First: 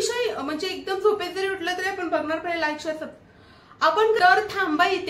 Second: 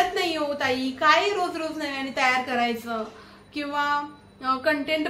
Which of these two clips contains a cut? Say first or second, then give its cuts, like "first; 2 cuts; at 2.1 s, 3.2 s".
first; 1 cut; at 4.2 s